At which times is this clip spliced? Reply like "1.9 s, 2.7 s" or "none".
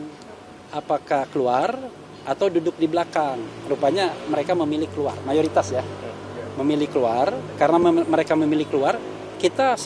none